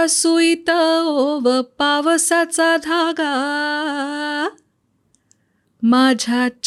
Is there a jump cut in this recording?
no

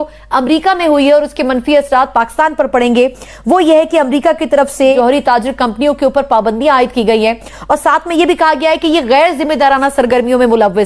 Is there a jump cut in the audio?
yes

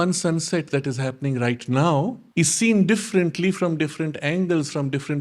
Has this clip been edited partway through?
yes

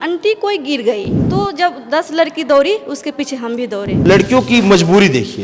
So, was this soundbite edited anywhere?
yes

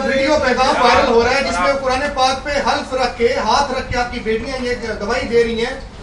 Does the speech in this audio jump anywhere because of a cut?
no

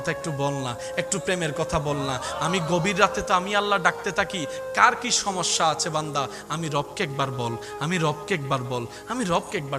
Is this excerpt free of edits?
yes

